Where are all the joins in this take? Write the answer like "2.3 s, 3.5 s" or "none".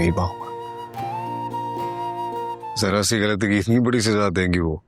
2.7 s